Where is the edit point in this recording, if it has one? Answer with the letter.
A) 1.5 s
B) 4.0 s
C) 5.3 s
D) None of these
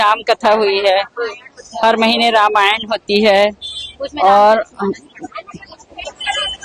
D